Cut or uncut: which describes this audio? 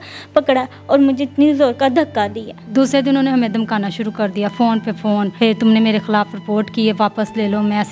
cut